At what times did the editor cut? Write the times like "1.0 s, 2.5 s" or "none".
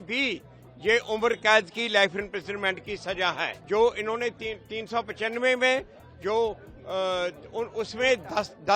3.5 s